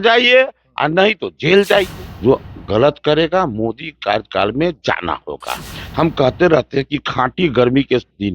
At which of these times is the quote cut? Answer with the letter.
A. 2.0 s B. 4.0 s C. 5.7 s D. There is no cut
A